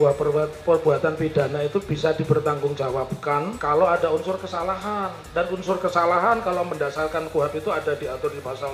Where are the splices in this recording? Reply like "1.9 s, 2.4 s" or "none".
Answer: 3.5 s